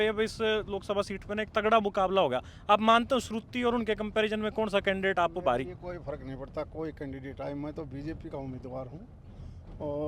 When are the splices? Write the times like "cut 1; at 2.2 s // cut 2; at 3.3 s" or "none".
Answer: none